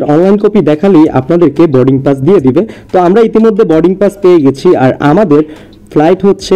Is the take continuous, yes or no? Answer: yes